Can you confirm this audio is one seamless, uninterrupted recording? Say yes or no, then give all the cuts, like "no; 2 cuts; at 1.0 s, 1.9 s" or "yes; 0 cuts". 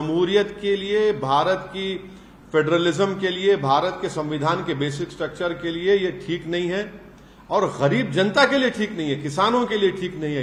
yes; 0 cuts